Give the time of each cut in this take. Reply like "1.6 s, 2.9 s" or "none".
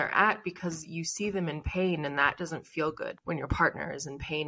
3.2 s